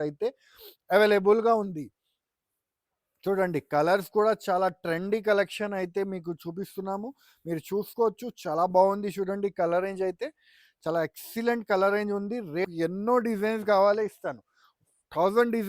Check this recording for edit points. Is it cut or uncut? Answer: cut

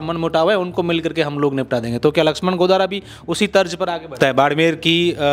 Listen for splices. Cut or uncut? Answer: cut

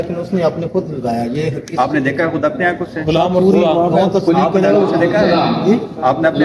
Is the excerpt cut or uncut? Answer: uncut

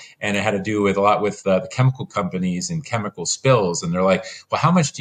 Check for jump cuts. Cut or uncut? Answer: uncut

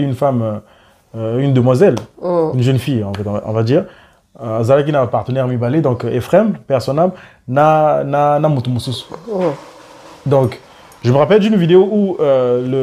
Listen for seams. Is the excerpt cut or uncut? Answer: uncut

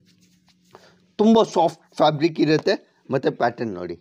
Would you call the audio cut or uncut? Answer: uncut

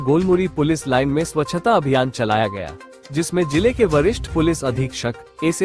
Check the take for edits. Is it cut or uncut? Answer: uncut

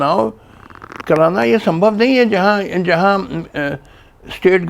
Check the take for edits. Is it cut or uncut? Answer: uncut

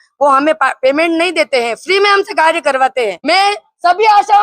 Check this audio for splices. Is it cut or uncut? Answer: cut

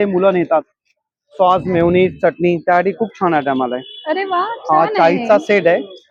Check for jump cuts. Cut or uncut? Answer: uncut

